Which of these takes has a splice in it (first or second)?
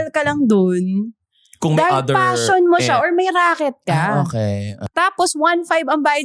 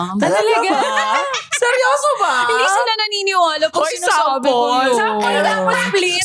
first